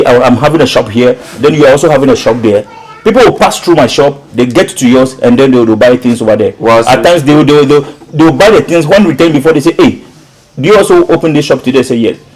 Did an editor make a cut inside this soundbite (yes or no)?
no